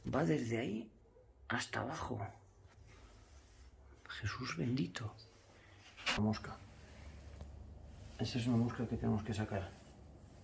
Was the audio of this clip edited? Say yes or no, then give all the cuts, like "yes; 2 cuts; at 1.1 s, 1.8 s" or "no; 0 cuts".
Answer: yes; 1 cut; at 6.2 s